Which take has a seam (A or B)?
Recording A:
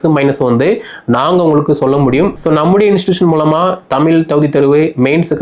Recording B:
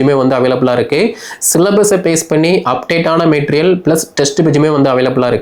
A